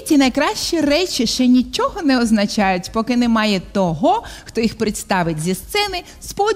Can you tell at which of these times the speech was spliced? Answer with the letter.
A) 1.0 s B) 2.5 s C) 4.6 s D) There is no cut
D